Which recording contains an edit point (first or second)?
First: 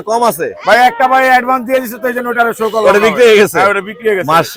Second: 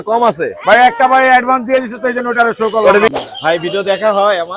second